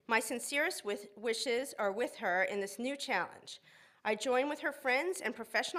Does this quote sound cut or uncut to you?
uncut